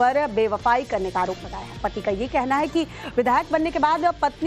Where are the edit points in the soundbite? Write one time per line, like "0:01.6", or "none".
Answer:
0:03.0